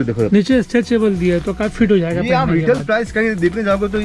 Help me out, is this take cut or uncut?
uncut